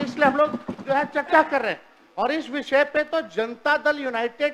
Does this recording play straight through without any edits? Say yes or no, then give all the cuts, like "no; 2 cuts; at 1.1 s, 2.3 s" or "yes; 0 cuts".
yes; 0 cuts